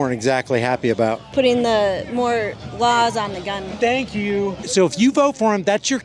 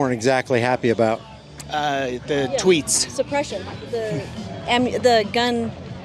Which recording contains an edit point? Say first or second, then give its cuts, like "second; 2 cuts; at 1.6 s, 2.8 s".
first; 2 cuts; at 1.2 s, 4.6 s